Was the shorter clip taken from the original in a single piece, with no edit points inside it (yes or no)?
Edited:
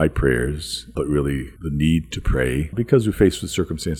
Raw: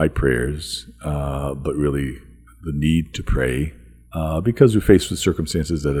no